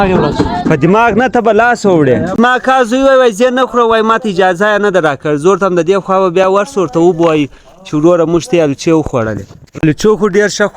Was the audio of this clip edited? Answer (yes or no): yes